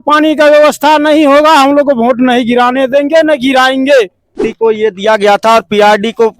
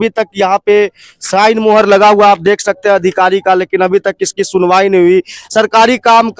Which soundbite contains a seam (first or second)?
first